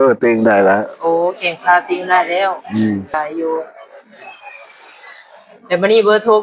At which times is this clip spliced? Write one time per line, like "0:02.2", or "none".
0:03.1